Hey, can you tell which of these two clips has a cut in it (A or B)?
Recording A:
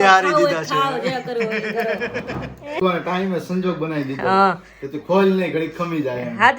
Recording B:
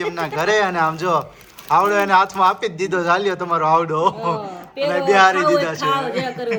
A